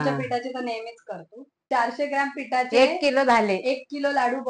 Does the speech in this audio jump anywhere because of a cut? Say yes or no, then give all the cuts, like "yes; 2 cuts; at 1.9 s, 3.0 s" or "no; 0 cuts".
yes; 1 cut; at 1.6 s